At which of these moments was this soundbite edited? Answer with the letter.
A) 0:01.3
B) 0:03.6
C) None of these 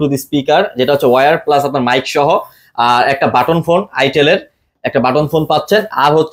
C